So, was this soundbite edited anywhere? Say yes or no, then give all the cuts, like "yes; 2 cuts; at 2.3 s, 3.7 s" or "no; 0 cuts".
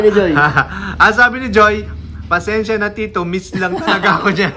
no; 0 cuts